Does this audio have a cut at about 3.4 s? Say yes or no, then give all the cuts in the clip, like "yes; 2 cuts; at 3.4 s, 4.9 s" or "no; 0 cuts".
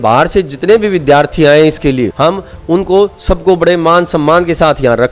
no; 1 cut; at 2.1 s